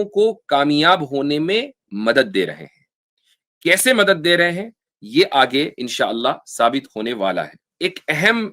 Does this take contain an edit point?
yes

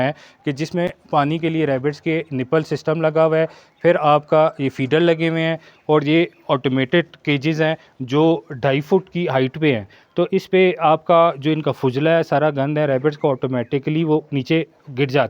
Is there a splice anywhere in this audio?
no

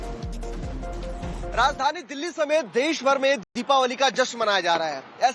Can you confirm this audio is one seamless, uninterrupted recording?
no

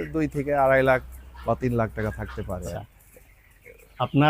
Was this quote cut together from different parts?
yes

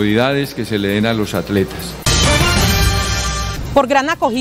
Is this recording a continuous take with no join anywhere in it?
no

